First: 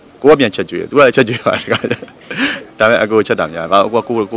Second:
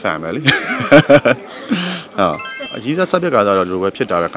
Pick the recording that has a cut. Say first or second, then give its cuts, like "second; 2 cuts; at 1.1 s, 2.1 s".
second; 1 cut; at 2.5 s